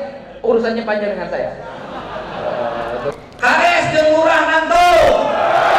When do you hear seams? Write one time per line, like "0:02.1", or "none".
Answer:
0:03.1

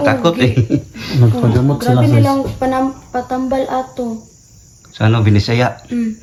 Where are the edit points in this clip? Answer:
none

